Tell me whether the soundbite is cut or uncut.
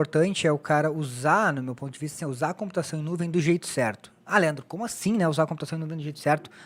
uncut